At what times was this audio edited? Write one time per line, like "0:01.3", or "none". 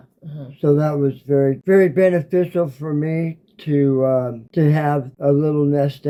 none